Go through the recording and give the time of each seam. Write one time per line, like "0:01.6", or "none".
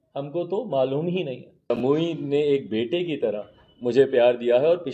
0:01.7